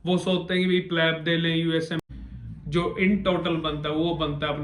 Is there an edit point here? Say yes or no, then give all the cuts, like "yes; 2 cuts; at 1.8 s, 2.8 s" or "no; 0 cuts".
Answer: yes; 1 cut; at 2.0 s